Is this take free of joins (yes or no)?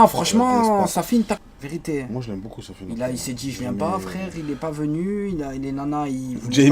no